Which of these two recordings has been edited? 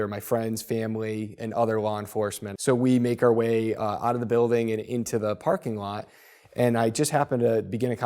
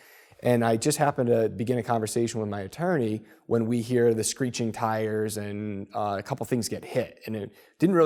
first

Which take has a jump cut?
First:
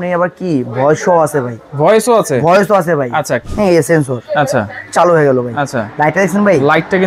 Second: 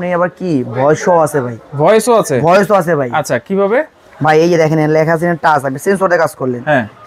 first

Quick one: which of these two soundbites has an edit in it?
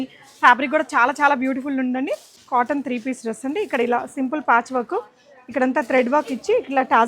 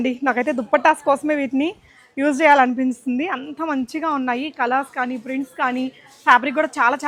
first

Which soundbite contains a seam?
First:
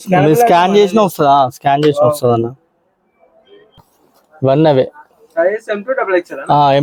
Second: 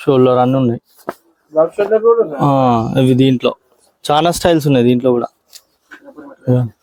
first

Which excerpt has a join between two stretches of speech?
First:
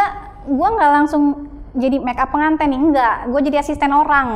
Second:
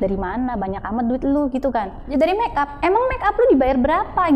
second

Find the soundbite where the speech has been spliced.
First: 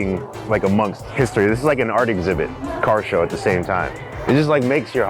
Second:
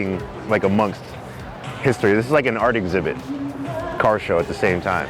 first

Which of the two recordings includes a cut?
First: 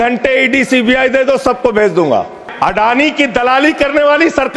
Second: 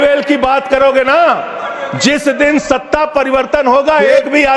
first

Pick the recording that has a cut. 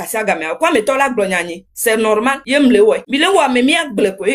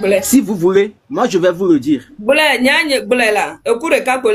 first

